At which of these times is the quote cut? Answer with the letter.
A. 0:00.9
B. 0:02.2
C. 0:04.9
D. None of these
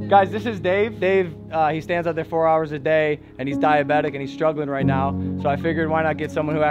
A